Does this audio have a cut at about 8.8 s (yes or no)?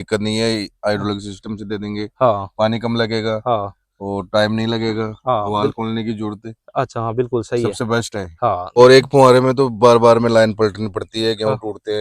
yes